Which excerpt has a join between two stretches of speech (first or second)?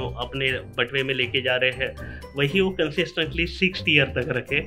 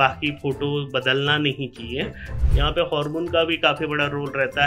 second